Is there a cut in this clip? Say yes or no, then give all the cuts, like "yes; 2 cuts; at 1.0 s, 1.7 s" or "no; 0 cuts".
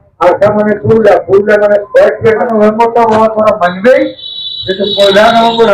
yes; 1 cut; at 2.4 s